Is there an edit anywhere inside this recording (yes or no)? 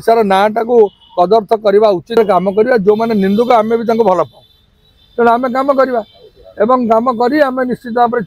yes